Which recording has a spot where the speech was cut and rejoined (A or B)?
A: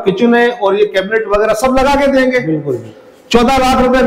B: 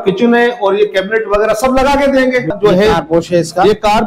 B